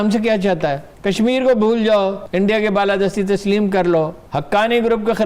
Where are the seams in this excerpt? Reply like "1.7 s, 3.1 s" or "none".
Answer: 0.9 s, 2.2 s, 4.2 s